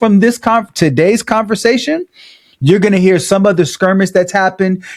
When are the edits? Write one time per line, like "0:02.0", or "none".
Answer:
none